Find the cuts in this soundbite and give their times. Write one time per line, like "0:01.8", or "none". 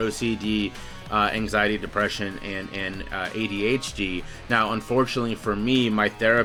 none